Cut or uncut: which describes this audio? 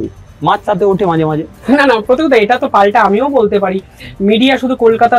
uncut